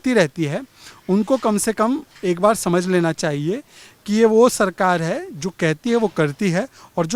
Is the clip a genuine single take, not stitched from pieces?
yes; 0 cuts

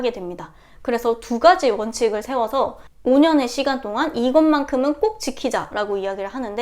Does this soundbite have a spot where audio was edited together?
yes; 1 cut; at 2.9 s

